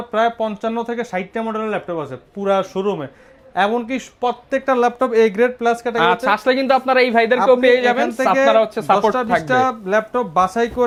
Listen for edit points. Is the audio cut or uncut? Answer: uncut